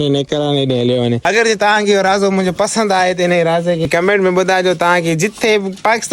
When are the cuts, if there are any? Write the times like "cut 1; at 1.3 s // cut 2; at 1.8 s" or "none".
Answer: cut 1; at 1.2 s // cut 2; at 3.8 s